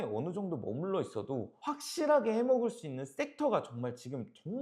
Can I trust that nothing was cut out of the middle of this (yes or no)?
yes